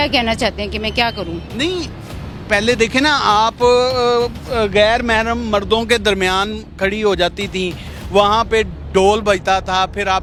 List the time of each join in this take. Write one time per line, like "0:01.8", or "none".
none